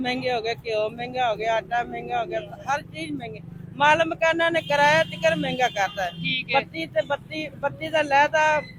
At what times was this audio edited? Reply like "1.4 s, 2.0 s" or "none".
none